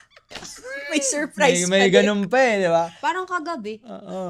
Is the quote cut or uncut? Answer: uncut